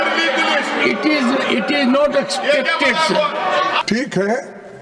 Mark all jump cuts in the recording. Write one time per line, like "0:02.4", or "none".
0:03.8